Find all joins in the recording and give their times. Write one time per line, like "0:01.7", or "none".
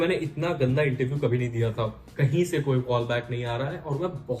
0:02.0